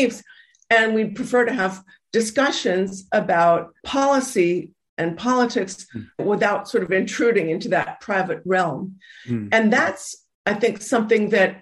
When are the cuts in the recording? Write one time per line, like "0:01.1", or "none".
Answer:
0:03.8
0:06.2